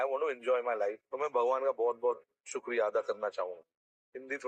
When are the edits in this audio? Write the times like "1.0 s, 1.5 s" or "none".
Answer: none